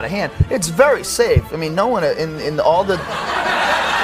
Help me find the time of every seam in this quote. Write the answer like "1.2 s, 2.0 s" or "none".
none